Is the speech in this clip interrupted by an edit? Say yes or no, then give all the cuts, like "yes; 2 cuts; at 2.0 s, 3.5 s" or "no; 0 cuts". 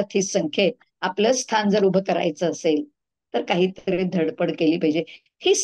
no; 0 cuts